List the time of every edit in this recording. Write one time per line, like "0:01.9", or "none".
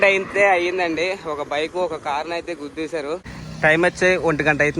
0:03.4